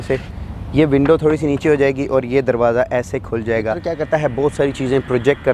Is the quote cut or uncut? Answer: cut